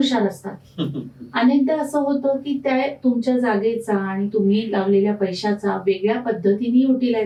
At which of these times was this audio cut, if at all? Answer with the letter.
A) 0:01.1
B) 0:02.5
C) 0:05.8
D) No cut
D